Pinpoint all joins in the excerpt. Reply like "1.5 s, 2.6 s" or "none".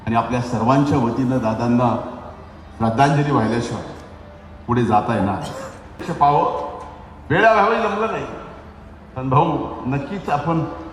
6.0 s